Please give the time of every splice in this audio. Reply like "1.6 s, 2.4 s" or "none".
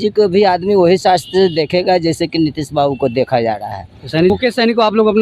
4.3 s